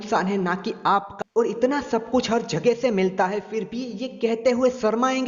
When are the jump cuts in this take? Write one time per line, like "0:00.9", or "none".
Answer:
0:01.1

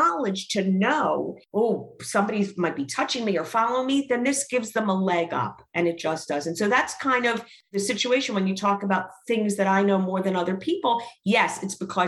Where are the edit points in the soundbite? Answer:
0:01.4
0:07.7

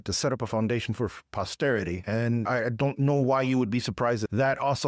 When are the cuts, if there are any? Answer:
0:02.5

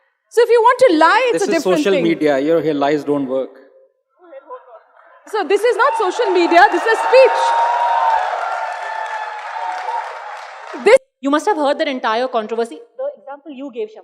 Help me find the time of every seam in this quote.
0:11.0

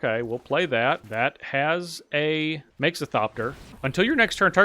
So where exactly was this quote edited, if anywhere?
0:01.1
0:02.7
0:03.7

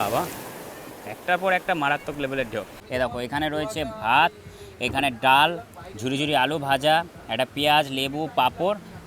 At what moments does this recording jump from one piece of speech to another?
0:02.8

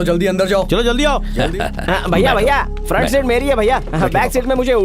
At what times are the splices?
0:01.3

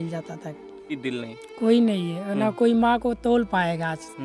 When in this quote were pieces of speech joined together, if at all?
0:01.0

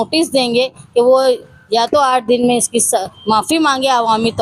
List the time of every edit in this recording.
none

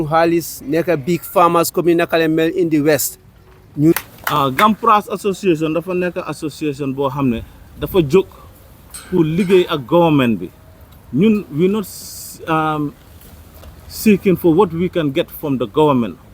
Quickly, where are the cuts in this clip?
0:03.9

